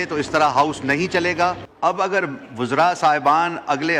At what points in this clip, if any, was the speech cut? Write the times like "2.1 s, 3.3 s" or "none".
1.7 s